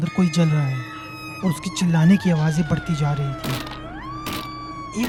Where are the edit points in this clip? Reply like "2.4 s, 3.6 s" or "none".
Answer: none